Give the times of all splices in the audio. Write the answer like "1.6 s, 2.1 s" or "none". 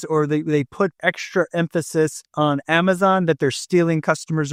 none